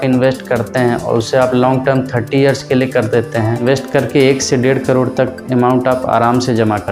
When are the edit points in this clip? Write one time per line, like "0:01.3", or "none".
0:03.6